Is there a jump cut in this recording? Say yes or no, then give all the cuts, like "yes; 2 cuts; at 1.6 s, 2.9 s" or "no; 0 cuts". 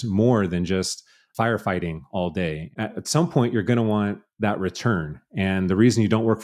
yes; 1 cut; at 2.6 s